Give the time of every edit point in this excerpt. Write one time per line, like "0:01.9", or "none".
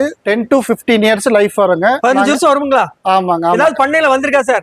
none